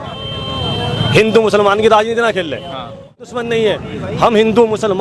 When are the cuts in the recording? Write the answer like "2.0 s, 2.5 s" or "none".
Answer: 3.2 s